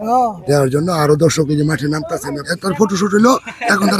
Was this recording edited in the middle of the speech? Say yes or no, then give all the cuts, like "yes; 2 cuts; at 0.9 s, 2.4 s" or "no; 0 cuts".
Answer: yes; 1 cut; at 2.4 s